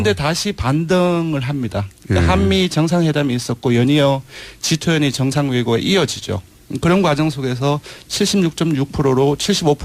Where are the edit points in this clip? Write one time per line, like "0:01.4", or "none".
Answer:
none